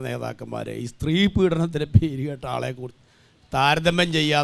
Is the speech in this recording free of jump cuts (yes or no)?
yes